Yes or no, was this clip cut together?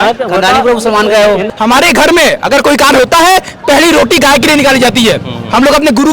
yes